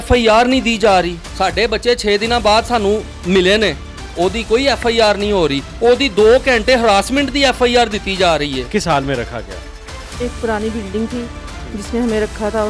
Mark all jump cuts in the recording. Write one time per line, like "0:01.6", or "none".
0:01.2
0:08.7